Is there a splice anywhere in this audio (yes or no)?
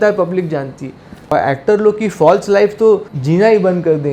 yes